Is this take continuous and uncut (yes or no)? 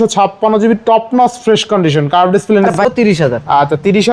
no